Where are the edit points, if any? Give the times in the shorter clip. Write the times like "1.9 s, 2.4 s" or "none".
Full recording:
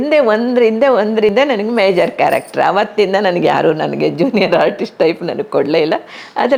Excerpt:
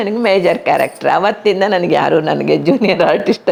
none